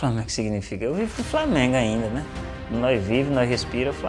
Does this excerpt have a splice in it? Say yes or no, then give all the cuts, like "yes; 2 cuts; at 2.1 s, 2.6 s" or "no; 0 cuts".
no; 0 cuts